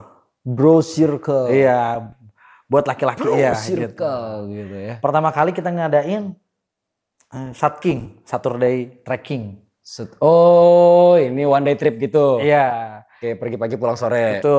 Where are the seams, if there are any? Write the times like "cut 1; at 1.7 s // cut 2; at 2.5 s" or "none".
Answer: none